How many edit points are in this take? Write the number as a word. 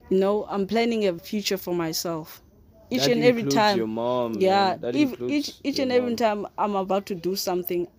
one